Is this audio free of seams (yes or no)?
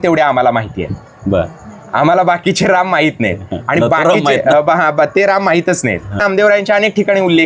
no